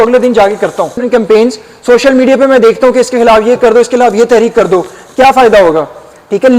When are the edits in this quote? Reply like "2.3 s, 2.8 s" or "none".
1.0 s